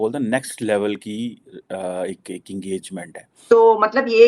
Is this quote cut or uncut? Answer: cut